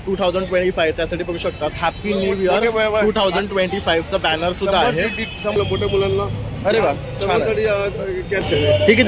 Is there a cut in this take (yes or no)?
yes